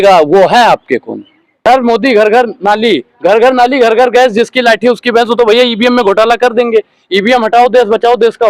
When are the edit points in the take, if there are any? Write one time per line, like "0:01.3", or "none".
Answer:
0:01.7